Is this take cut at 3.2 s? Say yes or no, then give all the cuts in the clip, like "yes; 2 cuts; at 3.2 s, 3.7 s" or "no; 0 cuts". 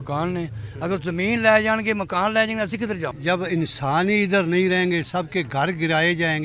yes; 1 cut; at 3.2 s